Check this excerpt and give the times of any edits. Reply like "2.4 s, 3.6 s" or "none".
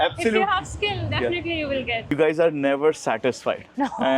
2.1 s

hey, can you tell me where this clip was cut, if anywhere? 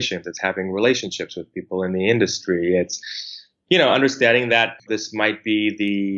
4.8 s

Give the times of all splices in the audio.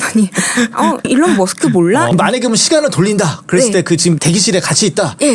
1.1 s, 2.1 s, 4.2 s

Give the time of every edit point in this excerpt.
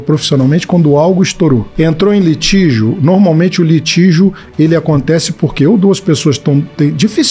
1.7 s

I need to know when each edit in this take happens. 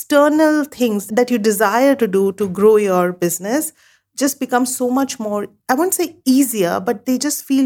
1.0 s

